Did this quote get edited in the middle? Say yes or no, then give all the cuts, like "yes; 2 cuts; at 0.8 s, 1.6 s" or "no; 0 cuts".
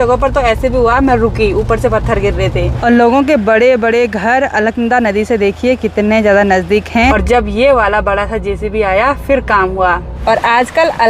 yes; 3 cuts; at 2.8 s, 7.1 s, 10.1 s